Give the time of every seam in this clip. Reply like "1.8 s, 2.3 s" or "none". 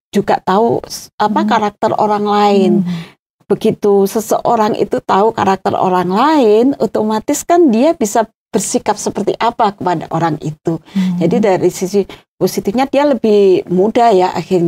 none